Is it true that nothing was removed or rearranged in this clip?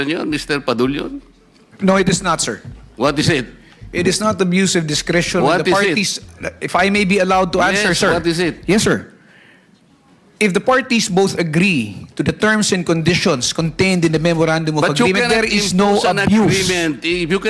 yes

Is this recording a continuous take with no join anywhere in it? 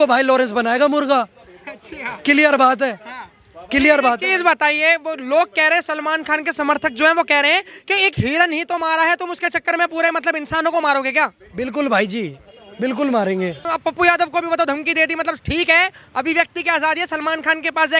yes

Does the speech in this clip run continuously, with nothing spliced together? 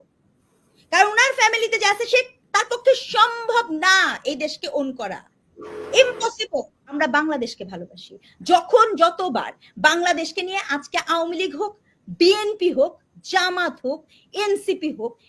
no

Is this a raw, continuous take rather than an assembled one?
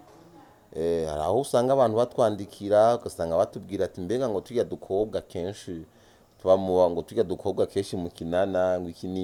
yes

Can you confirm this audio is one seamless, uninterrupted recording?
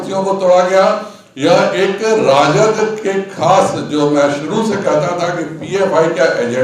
yes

